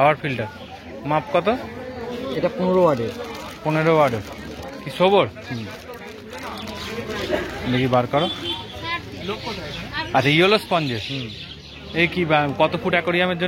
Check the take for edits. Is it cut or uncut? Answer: uncut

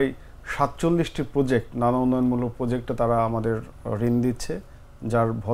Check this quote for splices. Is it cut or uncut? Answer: uncut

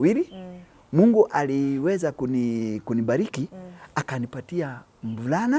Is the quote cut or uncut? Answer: uncut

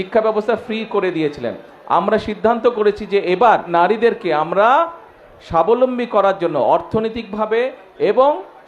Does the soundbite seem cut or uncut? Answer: cut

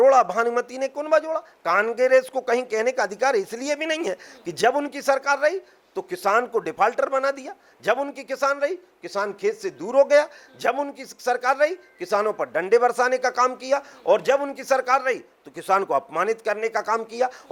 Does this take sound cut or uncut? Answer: uncut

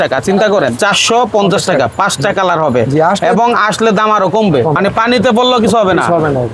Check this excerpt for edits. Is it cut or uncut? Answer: cut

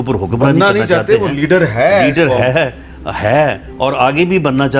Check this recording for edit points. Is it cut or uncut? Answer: uncut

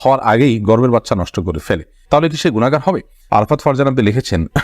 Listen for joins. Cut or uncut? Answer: cut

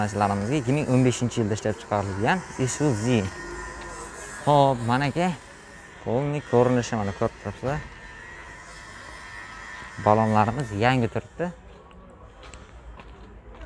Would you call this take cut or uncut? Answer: uncut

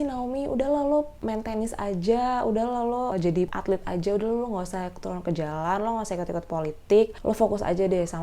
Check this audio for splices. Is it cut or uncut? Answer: cut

